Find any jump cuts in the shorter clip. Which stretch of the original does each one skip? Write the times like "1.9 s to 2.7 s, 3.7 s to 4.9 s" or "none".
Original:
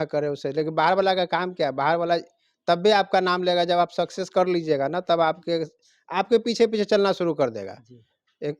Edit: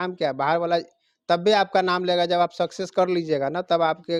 none